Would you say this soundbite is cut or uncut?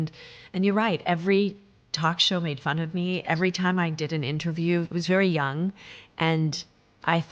cut